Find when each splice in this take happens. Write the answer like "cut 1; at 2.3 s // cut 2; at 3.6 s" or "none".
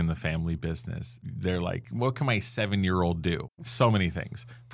cut 1; at 1.9 s // cut 2; at 3.5 s